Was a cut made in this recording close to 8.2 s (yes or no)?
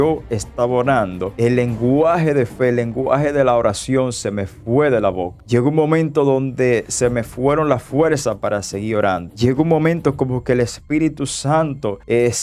no